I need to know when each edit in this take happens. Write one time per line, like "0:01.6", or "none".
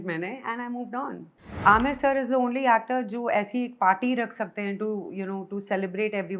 0:01.4